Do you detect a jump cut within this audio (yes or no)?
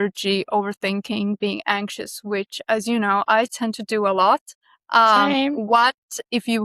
no